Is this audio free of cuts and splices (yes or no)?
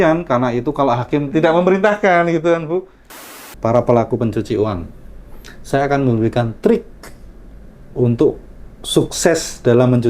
no